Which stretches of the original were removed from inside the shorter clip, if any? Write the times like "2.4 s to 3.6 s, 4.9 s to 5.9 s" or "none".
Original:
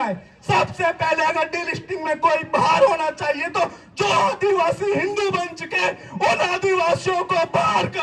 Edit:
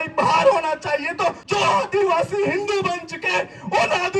3.8 s to 3.9 s